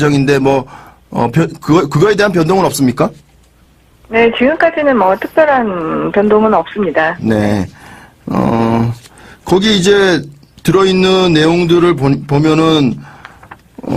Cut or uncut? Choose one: cut